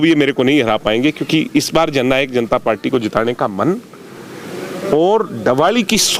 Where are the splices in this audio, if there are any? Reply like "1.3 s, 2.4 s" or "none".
none